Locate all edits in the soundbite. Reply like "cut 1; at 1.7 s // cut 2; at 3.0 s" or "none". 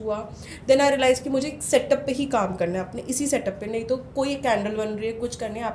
none